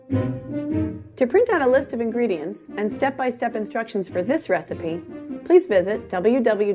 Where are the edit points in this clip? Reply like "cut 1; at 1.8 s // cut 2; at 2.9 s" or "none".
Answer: cut 1; at 1.1 s